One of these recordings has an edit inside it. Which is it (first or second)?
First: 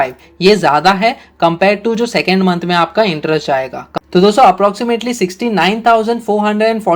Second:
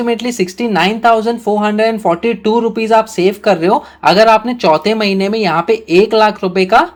first